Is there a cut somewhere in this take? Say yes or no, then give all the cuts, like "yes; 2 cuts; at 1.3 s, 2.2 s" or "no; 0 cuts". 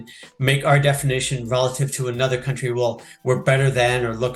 no; 0 cuts